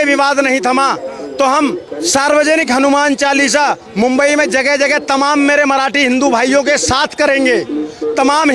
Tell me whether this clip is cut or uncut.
uncut